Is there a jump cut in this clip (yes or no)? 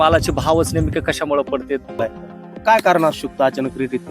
yes